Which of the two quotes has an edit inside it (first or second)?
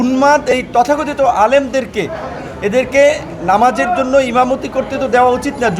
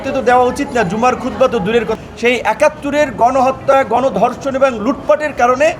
second